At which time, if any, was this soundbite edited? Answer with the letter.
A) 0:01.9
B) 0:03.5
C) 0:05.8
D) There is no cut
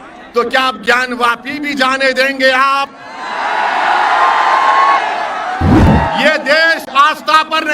C